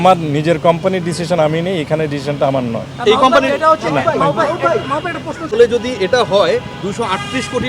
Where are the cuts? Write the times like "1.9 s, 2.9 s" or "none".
5.5 s